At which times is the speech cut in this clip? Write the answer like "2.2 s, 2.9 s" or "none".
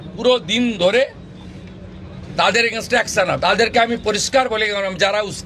3.4 s